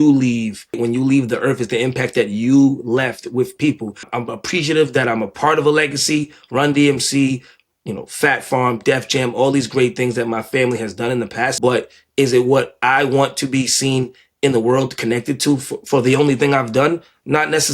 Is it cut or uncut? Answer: cut